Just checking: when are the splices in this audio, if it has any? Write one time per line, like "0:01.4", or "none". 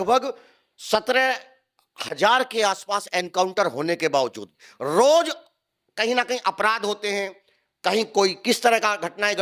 none